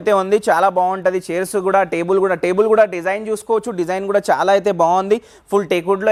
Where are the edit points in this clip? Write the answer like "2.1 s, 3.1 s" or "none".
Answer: none